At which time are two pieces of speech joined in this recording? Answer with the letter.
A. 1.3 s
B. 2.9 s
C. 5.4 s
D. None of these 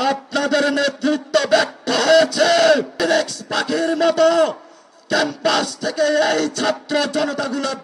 B